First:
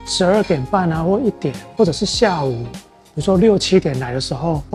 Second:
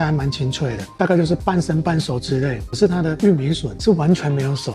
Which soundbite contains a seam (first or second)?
second